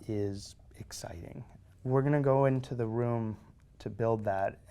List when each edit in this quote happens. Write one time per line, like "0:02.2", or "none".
0:01.6